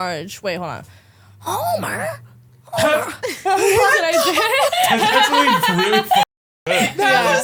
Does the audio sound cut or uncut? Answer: uncut